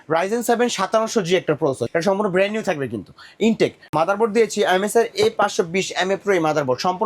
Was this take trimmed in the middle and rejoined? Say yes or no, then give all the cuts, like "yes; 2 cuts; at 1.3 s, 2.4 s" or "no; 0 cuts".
yes; 1 cut; at 3.8 s